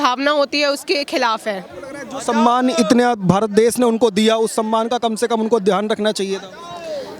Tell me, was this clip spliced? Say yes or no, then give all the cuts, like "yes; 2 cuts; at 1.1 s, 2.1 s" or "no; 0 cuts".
no; 0 cuts